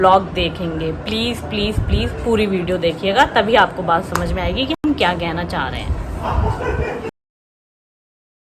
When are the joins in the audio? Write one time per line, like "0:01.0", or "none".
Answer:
none